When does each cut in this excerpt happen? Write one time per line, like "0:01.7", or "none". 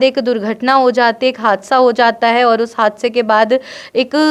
none